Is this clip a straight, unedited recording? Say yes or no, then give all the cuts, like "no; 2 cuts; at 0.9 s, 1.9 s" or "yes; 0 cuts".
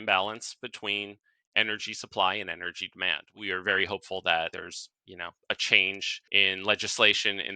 no; 3 cuts; at 3.3 s, 4.5 s, 6.1 s